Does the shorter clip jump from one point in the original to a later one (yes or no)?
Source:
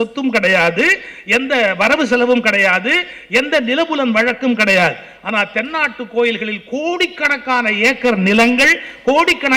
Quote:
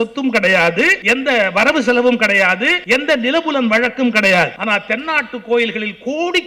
yes